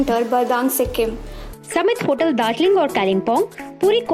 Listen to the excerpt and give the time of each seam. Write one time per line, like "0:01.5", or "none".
0:01.4